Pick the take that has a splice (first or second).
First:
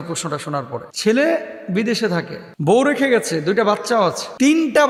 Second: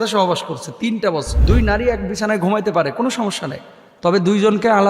second